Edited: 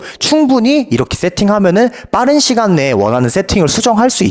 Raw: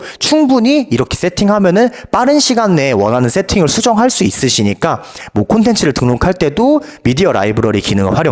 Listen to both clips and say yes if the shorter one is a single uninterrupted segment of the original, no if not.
yes